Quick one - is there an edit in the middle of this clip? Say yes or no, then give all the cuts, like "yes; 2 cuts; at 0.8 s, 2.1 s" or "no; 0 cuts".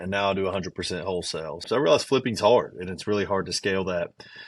yes; 1 cut; at 1.6 s